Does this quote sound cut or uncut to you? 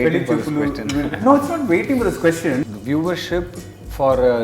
cut